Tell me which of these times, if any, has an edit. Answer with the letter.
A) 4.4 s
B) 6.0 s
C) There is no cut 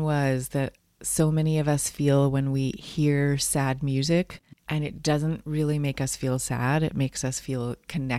A